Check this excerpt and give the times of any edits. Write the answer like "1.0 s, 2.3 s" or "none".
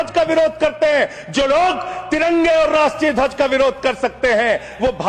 none